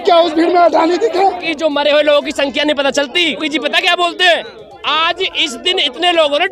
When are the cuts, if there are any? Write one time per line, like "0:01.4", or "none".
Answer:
0:01.5
0:03.4